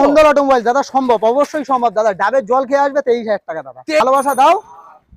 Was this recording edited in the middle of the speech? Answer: yes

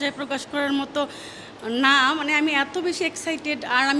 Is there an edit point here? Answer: no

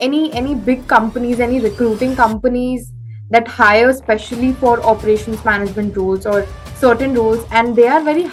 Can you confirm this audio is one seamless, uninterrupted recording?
yes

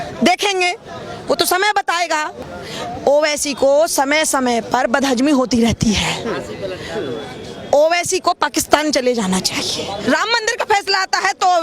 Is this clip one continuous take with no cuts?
no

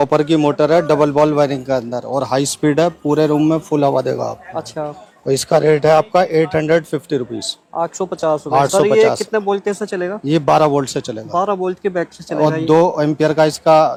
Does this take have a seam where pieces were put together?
no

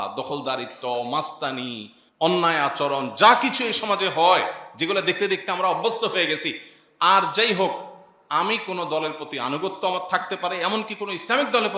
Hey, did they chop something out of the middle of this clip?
no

